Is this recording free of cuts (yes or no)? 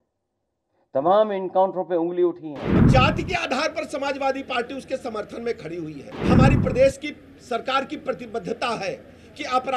no